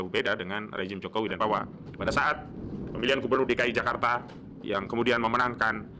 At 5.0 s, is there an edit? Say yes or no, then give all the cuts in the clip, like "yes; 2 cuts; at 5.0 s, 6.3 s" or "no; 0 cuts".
no; 1 cut; at 1.4 s